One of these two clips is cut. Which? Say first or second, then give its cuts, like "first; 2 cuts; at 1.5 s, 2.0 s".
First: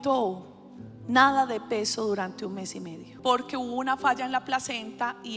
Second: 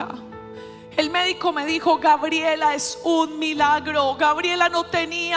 first; 1 cut; at 3.0 s